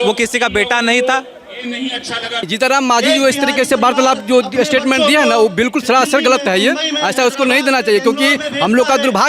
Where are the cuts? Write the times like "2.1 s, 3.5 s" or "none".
2.5 s